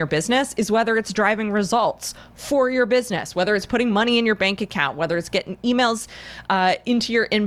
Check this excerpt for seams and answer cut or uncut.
uncut